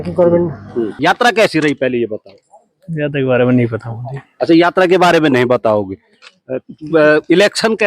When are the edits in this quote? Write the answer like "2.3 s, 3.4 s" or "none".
0.9 s